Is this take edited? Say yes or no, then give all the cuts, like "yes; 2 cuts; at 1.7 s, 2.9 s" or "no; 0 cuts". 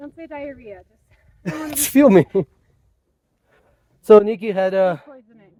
no; 0 cuts